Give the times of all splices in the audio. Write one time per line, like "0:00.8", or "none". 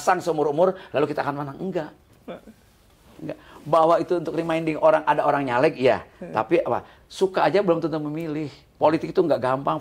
none

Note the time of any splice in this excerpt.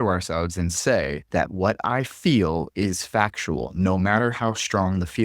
0:01.2

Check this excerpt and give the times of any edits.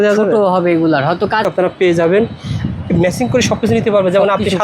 0:01.4

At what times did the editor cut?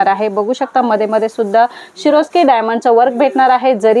none

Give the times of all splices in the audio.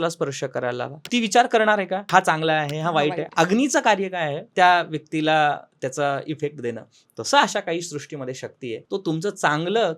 0:00.9
0:02.1
0:04.4
0:08.8

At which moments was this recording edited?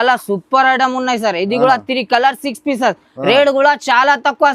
none

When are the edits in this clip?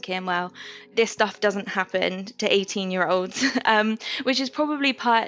0:00.9

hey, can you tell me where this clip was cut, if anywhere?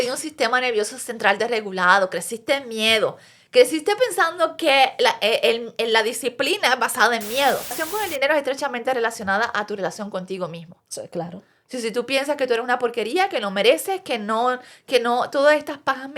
0:07.8

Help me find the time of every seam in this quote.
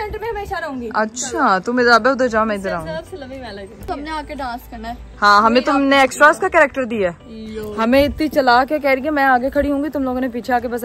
none

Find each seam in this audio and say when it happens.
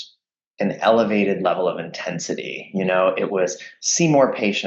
none

